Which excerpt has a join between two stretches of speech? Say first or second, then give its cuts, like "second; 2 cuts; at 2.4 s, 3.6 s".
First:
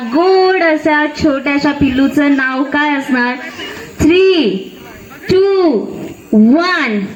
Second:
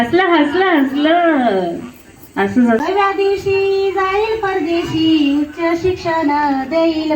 second; 1 cut; at 2.8 s